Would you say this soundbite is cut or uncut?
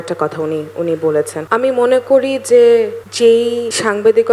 cut